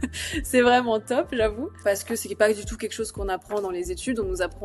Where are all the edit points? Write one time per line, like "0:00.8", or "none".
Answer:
0:01.7